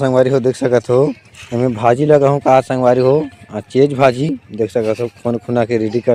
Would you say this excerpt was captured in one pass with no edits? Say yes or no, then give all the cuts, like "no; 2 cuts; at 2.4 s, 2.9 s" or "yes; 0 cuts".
yes; 0 cuts